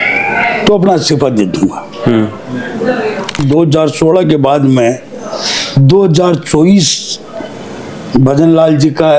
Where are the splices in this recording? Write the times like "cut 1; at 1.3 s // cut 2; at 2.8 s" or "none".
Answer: cut 1; at 3.4 s